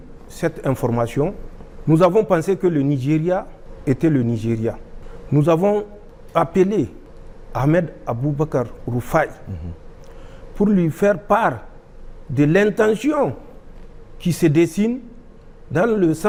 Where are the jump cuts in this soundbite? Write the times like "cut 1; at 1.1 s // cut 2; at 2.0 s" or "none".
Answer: none